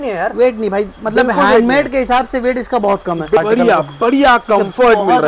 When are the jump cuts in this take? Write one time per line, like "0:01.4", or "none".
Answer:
0:03.4